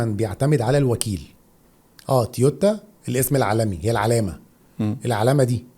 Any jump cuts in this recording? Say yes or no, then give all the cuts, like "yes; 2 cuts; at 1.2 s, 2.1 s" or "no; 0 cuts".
no; 0 cuts